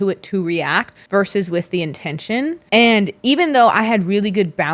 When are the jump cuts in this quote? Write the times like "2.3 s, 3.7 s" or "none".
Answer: 0.9 s, 2.6 s